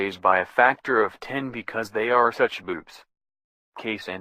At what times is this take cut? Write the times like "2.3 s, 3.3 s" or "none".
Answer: 1.2 s